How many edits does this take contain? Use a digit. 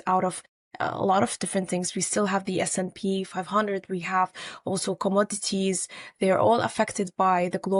0